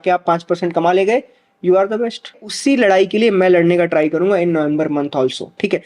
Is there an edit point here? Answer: yes; 1 cut; at 2.4 s

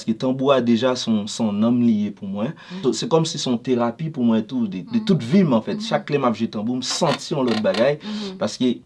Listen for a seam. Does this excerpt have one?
yes; 1 cut; at 2.8 s

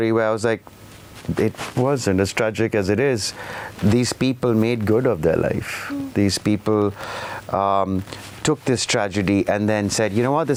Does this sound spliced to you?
no; 0 cuts

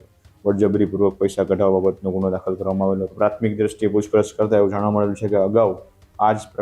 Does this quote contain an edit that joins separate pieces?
yes; 1 cut; at 3.1 s

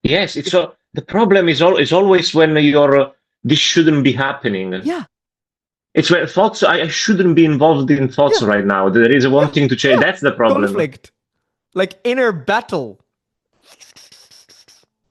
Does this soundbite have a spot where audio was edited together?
no; 0 cuts

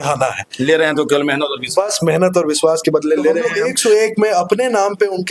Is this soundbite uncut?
no; 1 cut; at 3.5 s

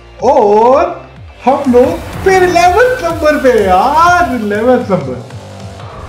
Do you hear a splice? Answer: no; 0 cuts

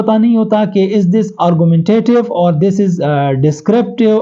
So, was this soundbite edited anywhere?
no; 0 cuts

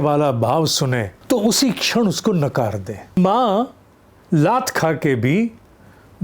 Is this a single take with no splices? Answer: no; 2 cuts; at 1.1 s, 3.2 s

